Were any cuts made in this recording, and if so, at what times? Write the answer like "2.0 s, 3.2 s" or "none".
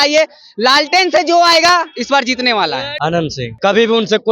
3.2 s